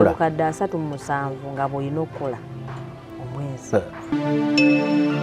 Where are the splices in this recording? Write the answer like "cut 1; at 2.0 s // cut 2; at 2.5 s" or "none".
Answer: cut 1; at 4.1 s